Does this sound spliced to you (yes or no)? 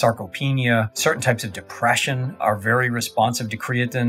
yes